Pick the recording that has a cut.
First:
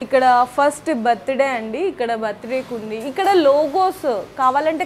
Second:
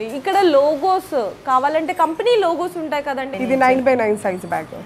second; 1 cut; at 3.3 s

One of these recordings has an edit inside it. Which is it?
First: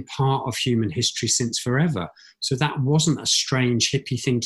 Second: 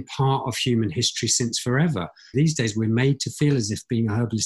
second; 1 cut; at 2.3 s

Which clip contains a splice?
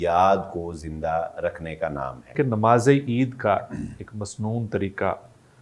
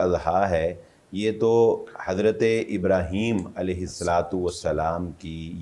first; 1 cut; at 2.3 s

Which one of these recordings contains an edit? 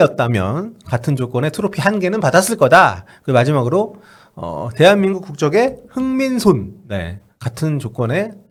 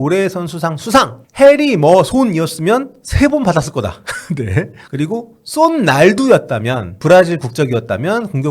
second; 3 cuts; at 1.2 s, 4.8 s, 6.9 s

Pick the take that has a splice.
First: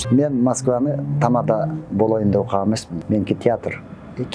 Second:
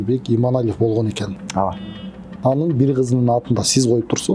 first; 1 cut; at 2.9 s

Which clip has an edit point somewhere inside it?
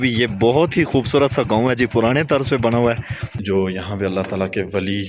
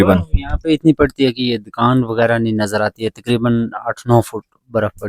first; 1 cut; at 3.3 s

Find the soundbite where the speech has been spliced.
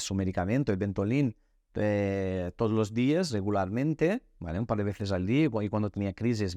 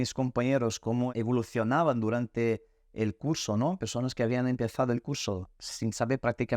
second; 1 cut; at 1.1 s

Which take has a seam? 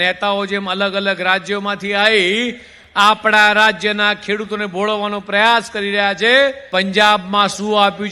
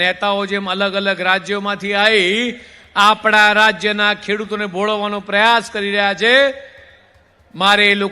first; 1 cut; at 6.6 s

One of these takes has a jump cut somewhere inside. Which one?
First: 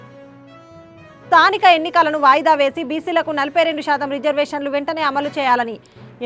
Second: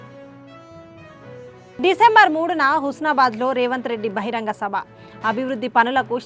second; 1 cut; at 1.3 s

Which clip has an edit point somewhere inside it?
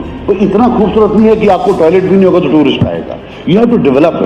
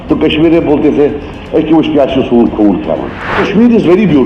second; 1 cut; at 3.4 s

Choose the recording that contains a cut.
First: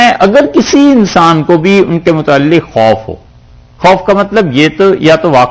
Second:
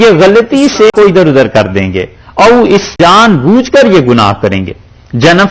second; 2 cuts; at 0.9 s, 2.9 s

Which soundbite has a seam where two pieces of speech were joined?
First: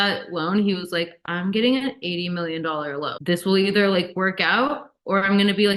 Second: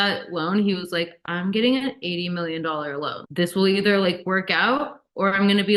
first; 1 cut; at 3.1 s

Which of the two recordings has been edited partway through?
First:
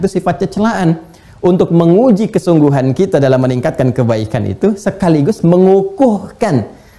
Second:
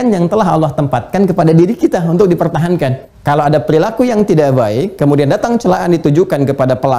second; 1 cut; at 3.1 s

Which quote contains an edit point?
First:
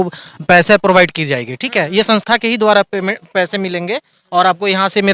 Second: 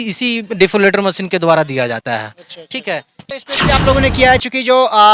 second; 1 cut; at 3.2 s

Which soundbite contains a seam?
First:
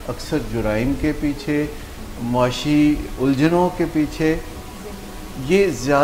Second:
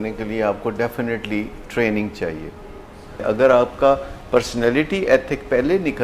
second; 1 cut; at 3.2 s

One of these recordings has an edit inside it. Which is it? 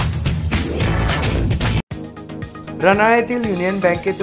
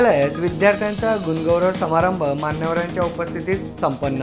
first; 1 cut; at 1.8 s

